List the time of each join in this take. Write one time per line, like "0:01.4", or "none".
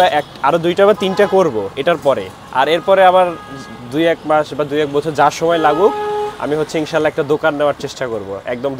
none